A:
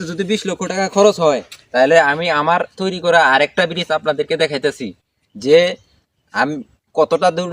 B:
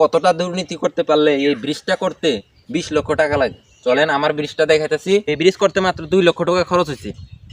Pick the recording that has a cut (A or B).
B